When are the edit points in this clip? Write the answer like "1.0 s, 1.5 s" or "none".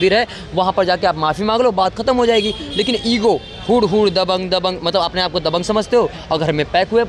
none